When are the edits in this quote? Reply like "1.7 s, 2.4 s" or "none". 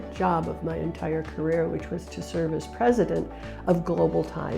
none